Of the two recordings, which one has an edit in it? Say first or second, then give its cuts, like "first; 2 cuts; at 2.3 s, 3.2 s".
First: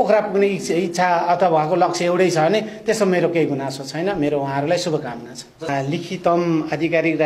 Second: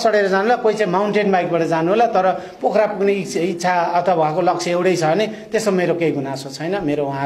first; 1 cut; at 5.7 s